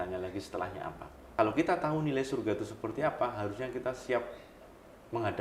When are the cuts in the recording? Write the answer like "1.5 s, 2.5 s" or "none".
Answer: 1.1 s